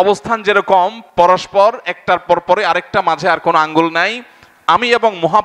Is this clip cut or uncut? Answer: cut